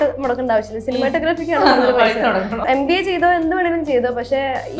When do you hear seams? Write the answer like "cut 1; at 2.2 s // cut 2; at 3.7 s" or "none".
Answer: cut 1; at 2.6 s